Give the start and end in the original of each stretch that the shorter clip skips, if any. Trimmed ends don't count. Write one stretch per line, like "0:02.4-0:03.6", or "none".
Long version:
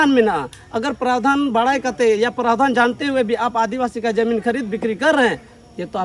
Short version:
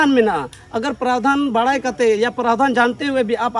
none